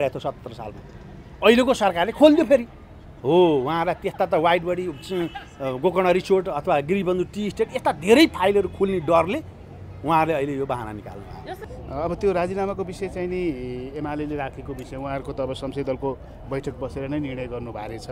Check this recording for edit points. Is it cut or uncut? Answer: cut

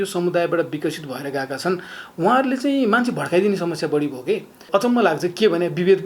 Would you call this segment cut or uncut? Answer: cut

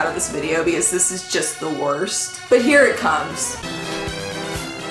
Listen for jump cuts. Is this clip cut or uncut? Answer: cut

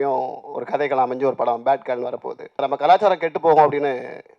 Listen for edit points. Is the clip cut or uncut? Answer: cut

